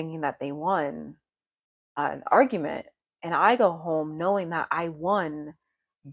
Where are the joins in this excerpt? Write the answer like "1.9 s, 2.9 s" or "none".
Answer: none